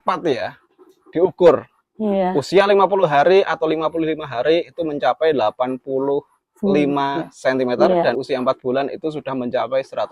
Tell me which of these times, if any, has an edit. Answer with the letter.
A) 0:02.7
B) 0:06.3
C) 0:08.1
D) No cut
D